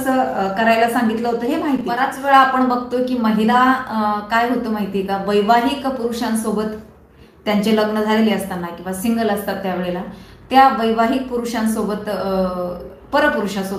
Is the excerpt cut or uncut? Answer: cut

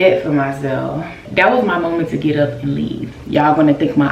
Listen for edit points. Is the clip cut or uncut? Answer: cut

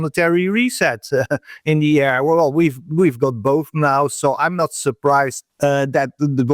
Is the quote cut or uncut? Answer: cut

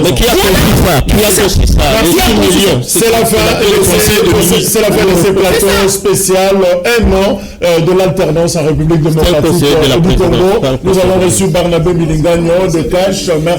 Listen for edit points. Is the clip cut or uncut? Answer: uncut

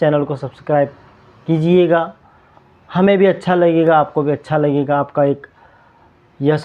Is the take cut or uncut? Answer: uncut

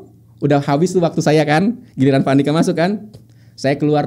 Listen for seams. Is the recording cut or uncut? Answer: uncut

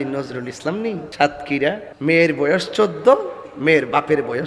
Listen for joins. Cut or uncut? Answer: cut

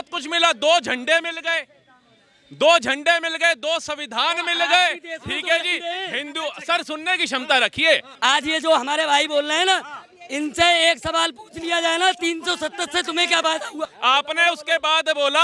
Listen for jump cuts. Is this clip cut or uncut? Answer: cut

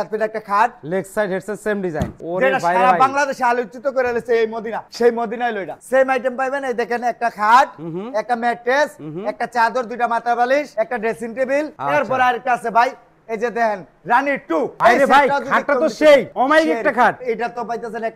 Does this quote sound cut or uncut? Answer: cut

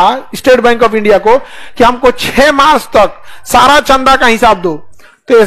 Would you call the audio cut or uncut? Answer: uncut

